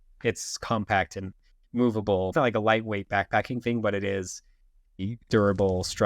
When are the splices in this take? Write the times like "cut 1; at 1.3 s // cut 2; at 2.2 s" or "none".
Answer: cut 1; at 2.3 s // cut 2; at 5.0 s